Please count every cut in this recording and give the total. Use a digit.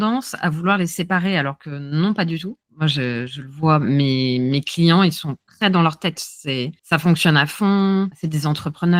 0